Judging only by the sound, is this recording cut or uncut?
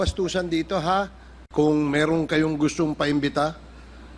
cut